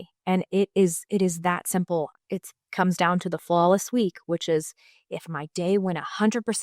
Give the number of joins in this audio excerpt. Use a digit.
1